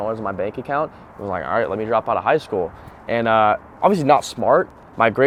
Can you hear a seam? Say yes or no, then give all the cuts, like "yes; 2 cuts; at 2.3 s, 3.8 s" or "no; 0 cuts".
no; 0 cuts